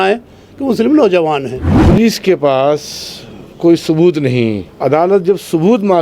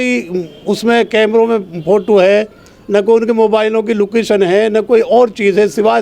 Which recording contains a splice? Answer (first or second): first